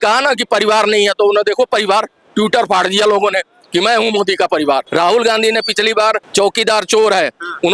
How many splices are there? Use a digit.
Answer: 2